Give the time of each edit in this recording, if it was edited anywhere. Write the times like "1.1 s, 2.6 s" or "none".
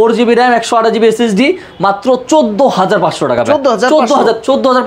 none